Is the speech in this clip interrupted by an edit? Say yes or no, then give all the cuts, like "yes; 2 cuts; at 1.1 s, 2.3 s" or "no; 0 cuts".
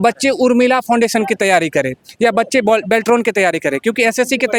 no; 0 cuts